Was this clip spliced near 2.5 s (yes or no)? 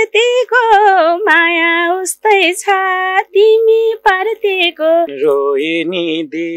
no